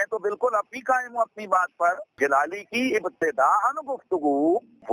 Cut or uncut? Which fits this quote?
uncut